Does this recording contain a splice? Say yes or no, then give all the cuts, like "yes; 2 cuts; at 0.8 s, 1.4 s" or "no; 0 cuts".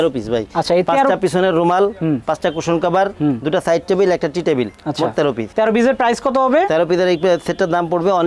no; 0 cuts